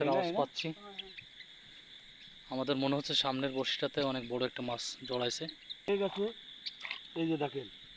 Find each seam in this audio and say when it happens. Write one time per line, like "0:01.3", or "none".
0:05.9